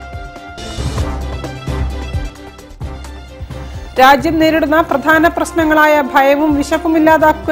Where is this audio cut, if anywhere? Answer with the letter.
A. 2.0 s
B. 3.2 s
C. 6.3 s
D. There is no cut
B